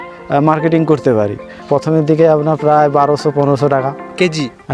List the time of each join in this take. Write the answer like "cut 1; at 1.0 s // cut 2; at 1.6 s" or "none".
cut 1; at 1.5 s